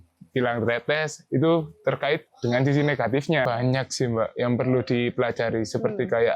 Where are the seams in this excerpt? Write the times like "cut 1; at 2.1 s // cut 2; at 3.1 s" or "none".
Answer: cut 1; at 3.4 s